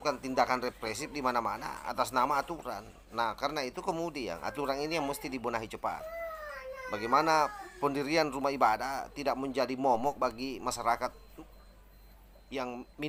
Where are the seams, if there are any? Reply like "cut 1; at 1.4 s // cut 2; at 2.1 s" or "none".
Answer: none